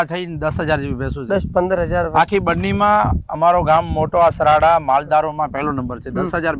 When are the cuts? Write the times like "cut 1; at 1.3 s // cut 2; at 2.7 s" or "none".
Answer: none